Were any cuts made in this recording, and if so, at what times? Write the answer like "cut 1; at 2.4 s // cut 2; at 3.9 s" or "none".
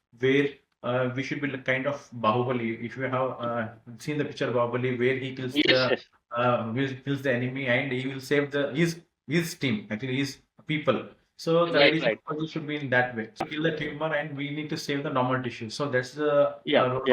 cut 1; at 13.4 s

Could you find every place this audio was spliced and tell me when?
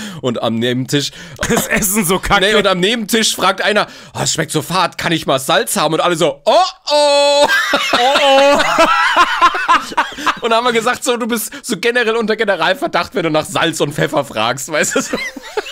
cut 1; at 10.4 s

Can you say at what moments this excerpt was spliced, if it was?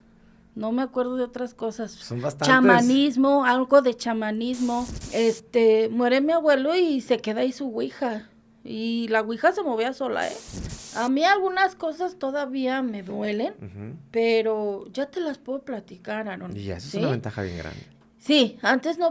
cut 1; at 4.9 s // cut 2; at 10.8 s

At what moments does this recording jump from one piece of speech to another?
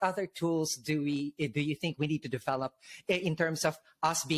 none

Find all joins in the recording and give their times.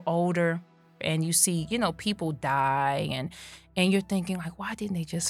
cut 1; at 1.0 s

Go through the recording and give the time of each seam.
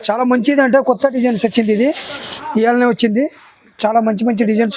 none

